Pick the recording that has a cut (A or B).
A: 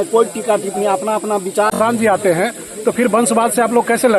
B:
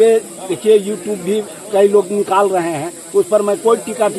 A